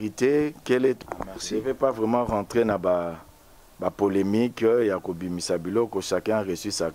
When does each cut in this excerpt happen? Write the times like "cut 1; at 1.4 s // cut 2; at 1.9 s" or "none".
cut 1; at 1.0 s